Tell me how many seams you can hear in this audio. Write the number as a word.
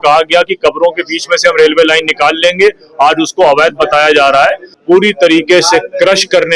one